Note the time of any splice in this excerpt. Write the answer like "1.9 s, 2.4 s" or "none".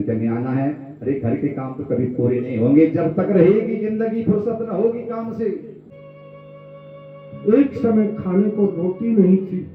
5.7 s